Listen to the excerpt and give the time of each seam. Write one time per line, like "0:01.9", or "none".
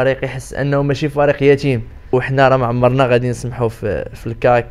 0:02.1